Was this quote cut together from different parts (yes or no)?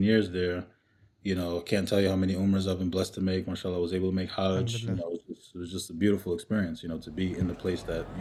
no